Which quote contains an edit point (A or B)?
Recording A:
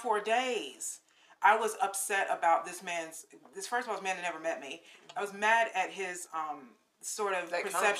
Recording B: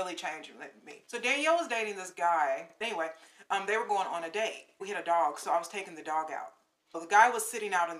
B